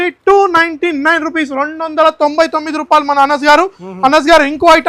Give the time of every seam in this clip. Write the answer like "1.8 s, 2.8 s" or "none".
none